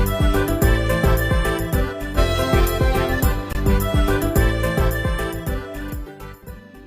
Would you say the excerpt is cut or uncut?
uncut